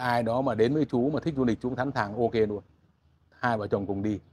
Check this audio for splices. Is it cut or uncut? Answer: uncut